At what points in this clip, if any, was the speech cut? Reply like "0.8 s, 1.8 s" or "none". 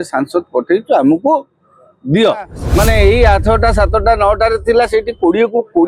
2.6 s

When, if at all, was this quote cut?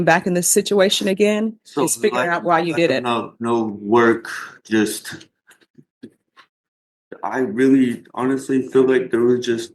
none

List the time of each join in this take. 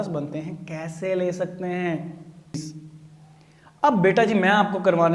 2.6 s

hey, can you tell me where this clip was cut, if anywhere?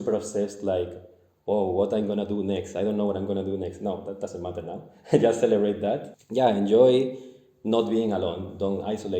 6.1 s

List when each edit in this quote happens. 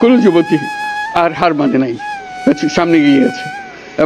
none

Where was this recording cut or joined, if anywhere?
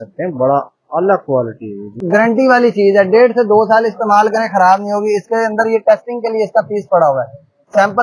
2.0 s

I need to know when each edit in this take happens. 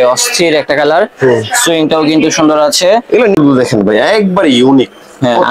3.4 s

